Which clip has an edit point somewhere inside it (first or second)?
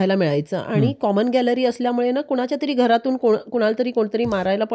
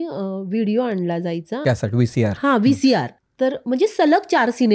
second